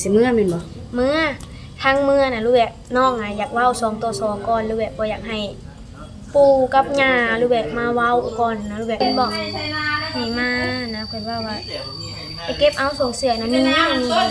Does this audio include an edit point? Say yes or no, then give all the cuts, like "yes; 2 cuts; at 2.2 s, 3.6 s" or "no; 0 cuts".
yes; 1 cut; at 9.0 s